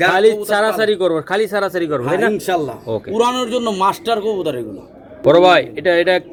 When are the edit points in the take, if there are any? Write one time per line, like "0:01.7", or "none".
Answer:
none